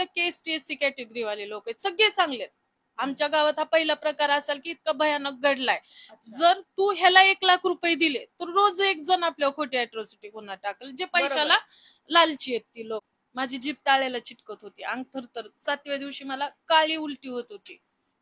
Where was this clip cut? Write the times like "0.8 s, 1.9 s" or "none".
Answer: 13.0 s